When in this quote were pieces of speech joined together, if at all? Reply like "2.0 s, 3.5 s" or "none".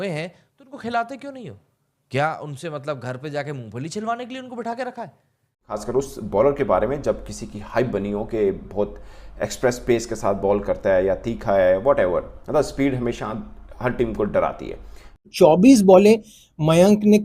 5.7 s, 15.2 s